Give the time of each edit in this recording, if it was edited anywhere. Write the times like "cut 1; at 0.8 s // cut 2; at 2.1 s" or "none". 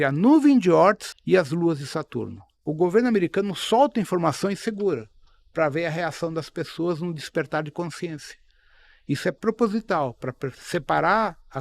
cut 1; at 2.6 s